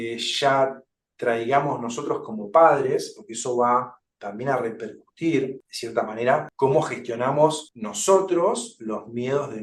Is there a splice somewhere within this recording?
no; 0 cuts

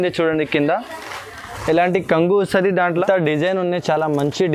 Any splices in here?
yes; 1 cut; at 2.9 s

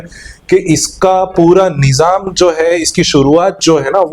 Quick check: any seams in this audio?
no; 0 cuts

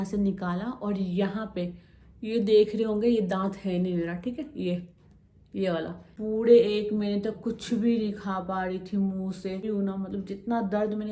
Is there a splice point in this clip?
yes; 2 cuts; at 6.0 s, 9.6 s

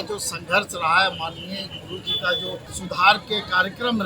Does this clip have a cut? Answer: yes; 1 cut; at 2.7 s

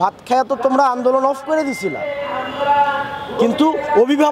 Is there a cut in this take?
no; 0 cuts

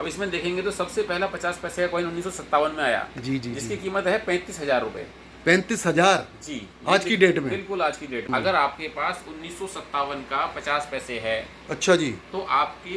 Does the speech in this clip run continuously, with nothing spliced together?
no; 1 cut; at 8.2 s

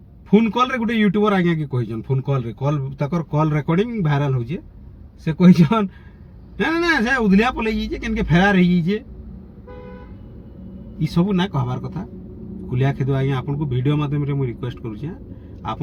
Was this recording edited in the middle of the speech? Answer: no; 0 cuts

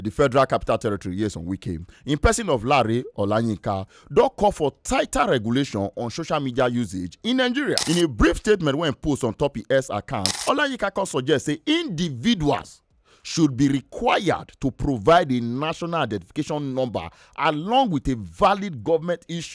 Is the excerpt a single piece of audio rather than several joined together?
no; 2 cuts; at 7.8 s, 10.3 s

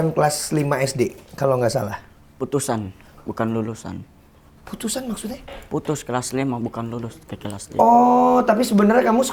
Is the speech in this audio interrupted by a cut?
no; 0 cuts

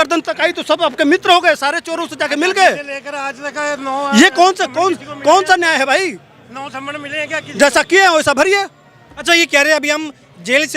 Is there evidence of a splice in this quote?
no; 0 cuts

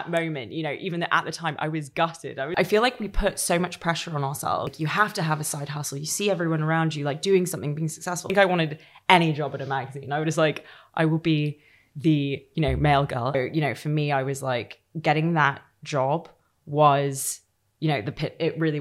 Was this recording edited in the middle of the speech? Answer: yes; 4 cuts; at 2.5 s, 4.7 s, 8.3 s, 13.3 s

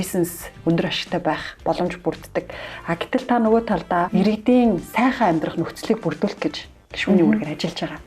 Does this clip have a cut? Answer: yes; 1 cut; at 4.1 s

